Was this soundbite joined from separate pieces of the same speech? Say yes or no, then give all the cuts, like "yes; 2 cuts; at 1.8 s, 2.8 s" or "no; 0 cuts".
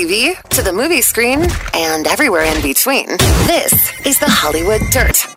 no; 0 cuts